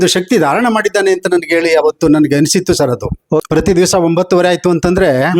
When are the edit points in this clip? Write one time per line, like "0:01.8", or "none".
0:03.4